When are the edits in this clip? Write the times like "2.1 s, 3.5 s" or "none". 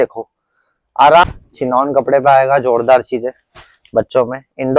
1.2 s